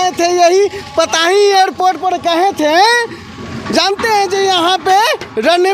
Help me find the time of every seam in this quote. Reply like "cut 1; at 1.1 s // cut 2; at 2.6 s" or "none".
none